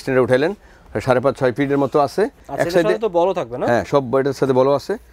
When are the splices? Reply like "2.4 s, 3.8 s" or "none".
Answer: 2.4 s